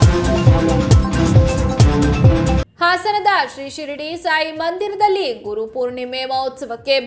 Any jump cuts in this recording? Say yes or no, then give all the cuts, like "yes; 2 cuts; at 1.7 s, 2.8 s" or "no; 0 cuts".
yes; 1 cut; at 2.6 s